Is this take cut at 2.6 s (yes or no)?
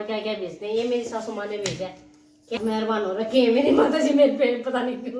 yes